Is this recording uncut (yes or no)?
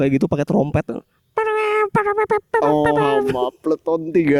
yes